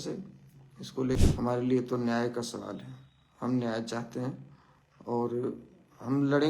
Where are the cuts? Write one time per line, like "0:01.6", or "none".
0:01.2